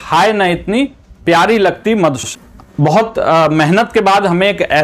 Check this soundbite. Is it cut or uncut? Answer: cut